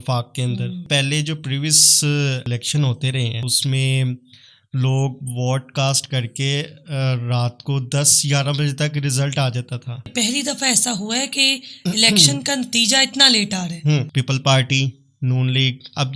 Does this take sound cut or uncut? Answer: cut